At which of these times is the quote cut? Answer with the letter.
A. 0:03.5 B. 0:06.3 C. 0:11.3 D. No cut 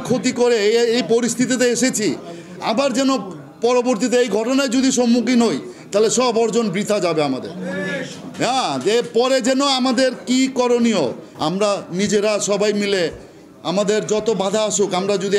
D